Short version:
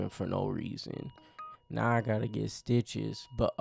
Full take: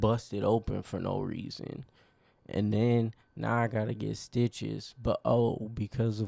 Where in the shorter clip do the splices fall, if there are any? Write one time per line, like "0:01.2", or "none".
0:01.6